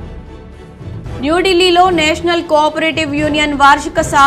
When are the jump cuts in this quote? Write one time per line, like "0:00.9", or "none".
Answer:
0:01.2